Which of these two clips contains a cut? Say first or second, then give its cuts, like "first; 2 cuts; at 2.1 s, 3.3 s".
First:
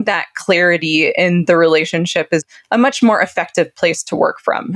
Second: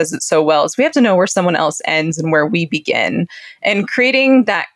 first; 1 cut; at 2.5 s